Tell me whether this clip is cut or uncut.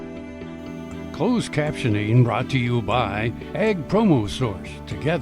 cut